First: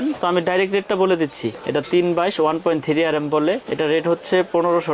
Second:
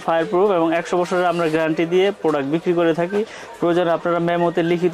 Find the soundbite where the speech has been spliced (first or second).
first